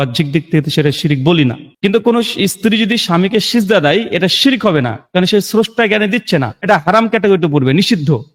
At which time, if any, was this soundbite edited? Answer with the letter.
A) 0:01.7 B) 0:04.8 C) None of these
A